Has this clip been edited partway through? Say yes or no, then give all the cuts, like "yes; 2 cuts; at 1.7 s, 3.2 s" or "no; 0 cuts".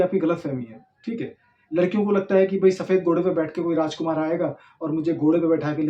no; 0 cuts